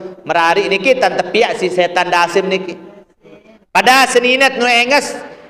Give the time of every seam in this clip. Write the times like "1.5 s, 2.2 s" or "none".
none